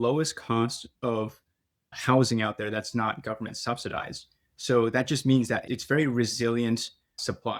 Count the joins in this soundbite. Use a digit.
0